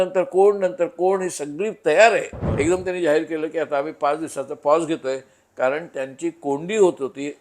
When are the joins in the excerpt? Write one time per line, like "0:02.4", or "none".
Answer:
0:02.4